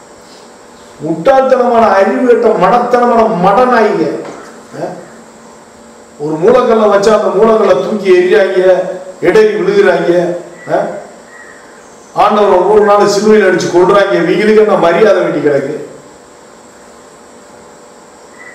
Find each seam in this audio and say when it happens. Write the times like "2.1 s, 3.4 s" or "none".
5.8 s